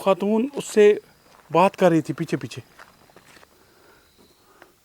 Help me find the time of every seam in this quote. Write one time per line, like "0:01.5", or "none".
0:03.4